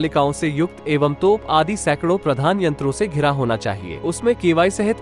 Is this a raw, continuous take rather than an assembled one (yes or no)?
no